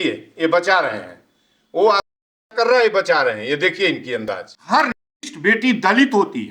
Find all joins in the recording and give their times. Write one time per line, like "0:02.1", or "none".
0:04.5